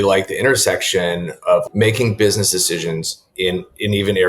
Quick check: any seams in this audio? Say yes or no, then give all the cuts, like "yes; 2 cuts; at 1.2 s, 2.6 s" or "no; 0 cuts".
yes; 1 cut; at 1.6 s